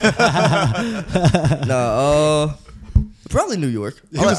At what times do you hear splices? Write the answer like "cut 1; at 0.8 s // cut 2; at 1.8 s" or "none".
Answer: none